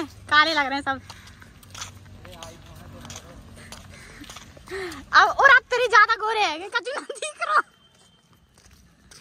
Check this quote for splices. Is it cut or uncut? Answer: uncut